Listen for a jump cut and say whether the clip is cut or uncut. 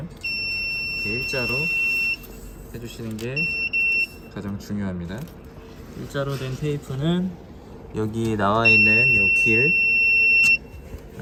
uncut